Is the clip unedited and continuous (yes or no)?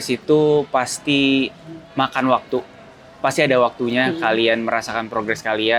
yes